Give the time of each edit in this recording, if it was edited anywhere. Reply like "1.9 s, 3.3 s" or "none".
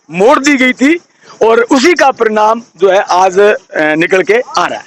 none